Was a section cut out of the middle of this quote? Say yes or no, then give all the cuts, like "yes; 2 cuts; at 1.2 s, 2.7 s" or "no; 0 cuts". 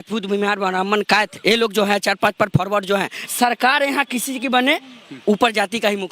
yes; 1 cut; at 3.2 s